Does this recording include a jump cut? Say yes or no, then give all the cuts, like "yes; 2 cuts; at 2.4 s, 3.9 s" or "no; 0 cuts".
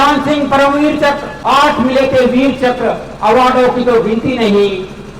yes; 1 cut; at 1.3 s